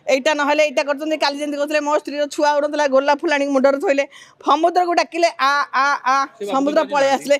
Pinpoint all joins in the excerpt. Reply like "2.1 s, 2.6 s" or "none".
none

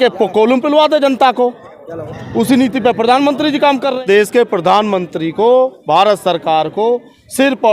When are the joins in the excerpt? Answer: 4.0 s

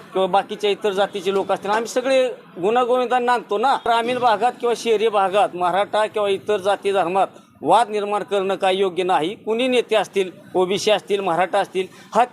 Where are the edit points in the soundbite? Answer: 3.8 s

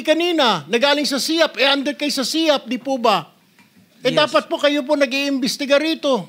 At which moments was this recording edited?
none

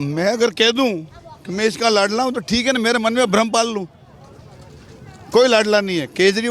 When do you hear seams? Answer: none

